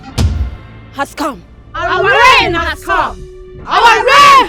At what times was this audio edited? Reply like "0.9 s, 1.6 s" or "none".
none